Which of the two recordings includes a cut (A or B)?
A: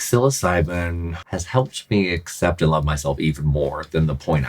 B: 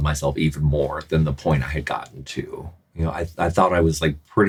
A